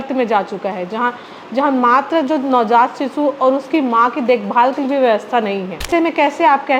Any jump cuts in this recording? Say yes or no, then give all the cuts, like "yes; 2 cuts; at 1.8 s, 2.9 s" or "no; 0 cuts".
yes; 1 cut; at 5.9 s